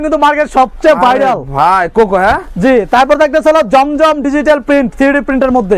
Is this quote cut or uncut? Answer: uncut